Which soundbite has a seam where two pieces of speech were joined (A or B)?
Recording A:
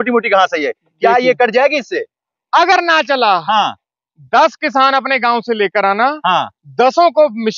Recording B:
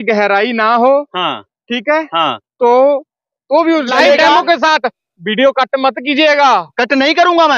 B